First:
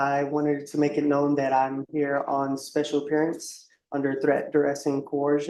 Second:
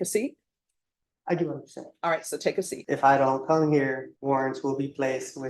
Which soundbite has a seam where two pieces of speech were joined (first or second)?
second